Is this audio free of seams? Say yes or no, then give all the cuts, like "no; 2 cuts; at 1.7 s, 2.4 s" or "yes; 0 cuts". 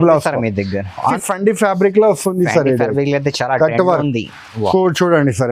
no; 1 cut; at 1.1 s